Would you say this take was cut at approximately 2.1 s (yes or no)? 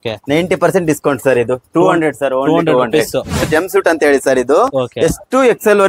no